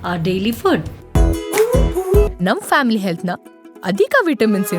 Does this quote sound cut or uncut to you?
cut